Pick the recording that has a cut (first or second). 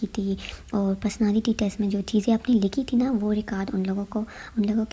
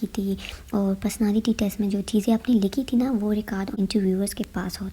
second